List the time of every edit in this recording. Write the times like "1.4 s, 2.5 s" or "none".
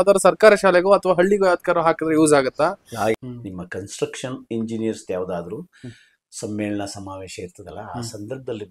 3.2 s